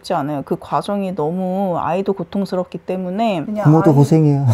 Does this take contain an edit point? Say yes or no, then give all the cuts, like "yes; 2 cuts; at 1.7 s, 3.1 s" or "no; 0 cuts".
no; 0 cuts